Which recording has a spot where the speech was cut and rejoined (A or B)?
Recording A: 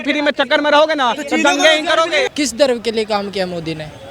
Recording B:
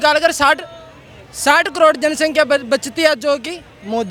A